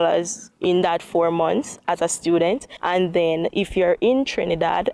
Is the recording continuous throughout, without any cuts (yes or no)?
no